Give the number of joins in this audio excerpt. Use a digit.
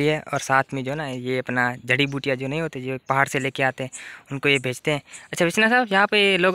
0